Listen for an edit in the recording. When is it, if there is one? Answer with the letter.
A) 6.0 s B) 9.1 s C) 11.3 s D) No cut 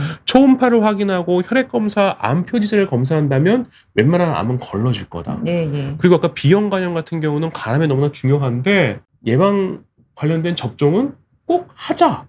B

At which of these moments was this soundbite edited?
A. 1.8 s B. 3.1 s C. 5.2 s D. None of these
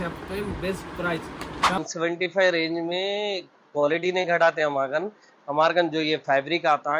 A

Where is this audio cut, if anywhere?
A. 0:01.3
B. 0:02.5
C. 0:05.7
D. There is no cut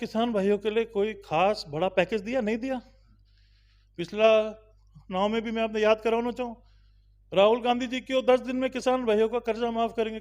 D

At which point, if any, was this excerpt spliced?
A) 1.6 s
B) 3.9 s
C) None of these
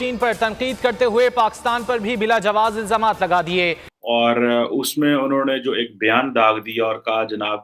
B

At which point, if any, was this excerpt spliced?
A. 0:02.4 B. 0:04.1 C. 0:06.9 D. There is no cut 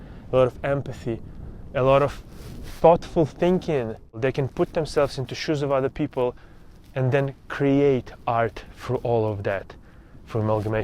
B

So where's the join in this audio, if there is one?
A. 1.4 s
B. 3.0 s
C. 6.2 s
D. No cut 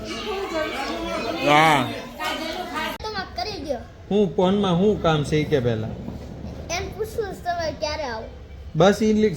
B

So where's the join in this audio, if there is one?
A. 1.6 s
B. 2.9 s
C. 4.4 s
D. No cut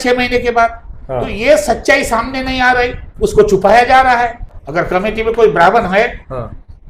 C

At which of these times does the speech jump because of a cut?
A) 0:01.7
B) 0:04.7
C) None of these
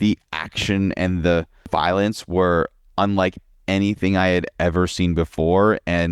A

